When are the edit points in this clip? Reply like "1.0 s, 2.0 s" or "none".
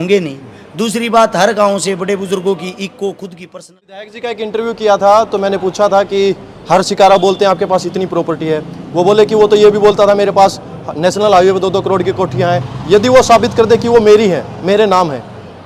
3.4 s